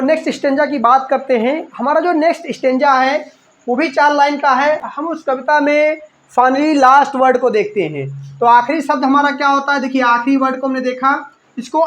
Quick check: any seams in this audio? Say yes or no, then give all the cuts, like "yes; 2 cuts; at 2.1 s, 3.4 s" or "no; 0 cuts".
yes; 1 cut; at 4.9 s